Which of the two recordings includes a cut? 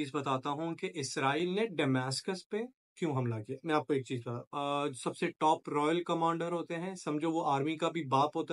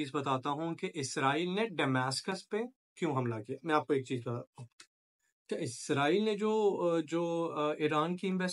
first; 1 cut; at 4.5 s

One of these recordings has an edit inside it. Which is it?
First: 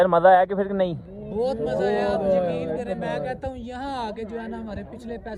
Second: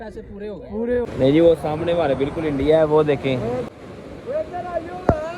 second; 2 cuts; at 1.1 s, 3.6 s

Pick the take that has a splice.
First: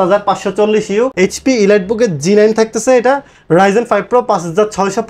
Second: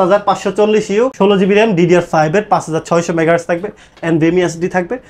first; 1 cut; at 1.1 s

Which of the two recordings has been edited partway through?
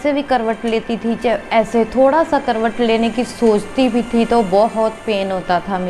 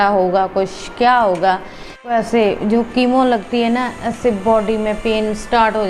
second; 1 cut; at 2.1 s

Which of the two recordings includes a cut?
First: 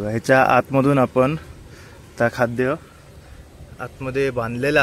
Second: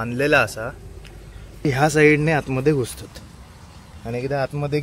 second; 1 cut; at 1.6 s

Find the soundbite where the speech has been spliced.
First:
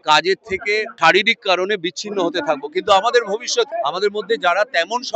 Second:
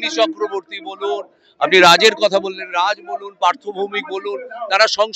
first; 2 cuts; at 0.9 s, 3.7 s

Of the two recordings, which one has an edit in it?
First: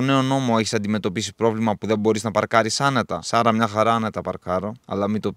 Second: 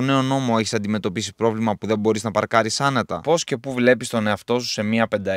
second; 1 cut; at 3.2 s

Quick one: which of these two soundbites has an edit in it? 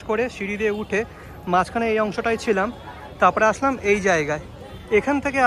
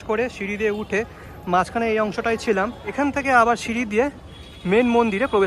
second; 1 cut; at 2.9 s

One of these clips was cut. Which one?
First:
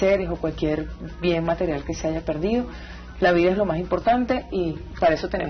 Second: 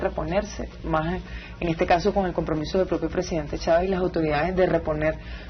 first; 1 cut; at 3.0 s

